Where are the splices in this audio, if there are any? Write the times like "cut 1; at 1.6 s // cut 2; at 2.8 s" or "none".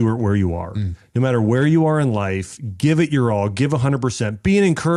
none